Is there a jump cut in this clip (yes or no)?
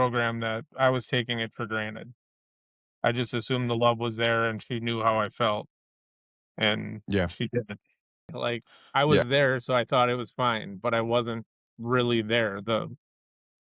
yes